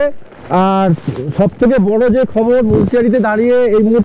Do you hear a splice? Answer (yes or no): no